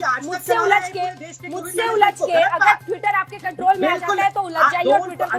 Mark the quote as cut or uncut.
uncut